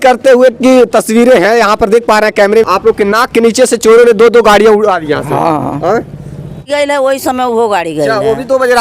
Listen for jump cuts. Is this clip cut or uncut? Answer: cut